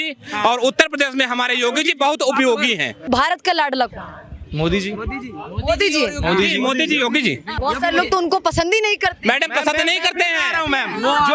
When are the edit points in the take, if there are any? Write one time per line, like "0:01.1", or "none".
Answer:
0:03.1
0:07.5

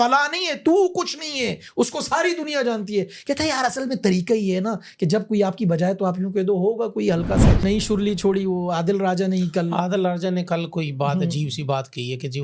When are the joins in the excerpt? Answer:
0:07.6

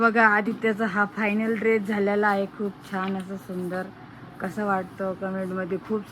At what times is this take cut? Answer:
none

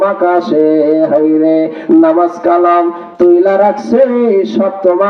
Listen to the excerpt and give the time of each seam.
none

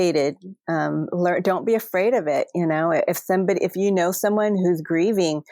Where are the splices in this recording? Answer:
none

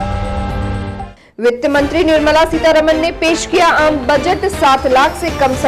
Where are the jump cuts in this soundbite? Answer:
0:01.1

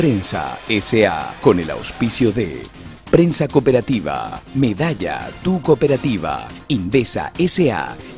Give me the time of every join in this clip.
0:01.3

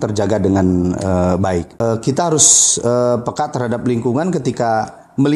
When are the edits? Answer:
0:01.8

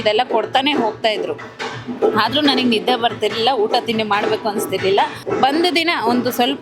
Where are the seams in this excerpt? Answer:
0:05.2

